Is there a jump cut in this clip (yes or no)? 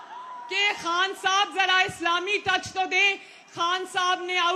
no